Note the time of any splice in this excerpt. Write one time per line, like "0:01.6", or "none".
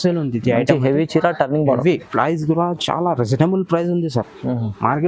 0:02.1